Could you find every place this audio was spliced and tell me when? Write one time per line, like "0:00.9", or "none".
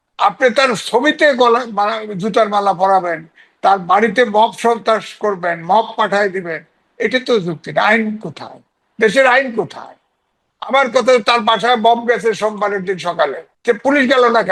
0:13.5